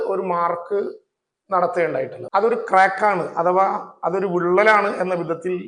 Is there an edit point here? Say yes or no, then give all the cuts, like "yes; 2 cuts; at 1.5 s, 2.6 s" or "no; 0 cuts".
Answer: yes; 1 cut; at 2.2 s